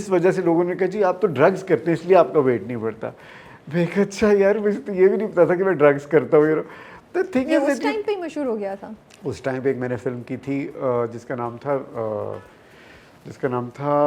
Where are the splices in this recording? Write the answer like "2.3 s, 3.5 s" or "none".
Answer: none